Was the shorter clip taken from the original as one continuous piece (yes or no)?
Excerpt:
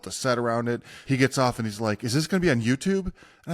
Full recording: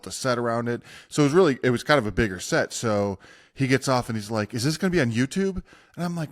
no